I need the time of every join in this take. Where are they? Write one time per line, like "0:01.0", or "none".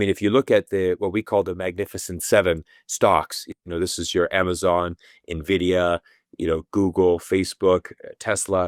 none